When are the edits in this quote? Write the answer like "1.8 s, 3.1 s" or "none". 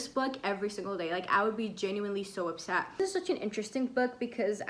2.9 s